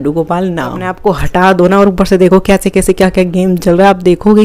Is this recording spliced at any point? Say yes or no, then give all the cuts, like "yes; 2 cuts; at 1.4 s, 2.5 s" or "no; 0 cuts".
yes; 1 cut; at 1.0 s